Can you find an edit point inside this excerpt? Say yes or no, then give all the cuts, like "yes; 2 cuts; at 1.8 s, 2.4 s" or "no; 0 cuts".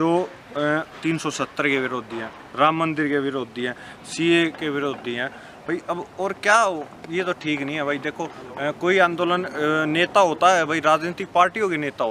no; 0 cuts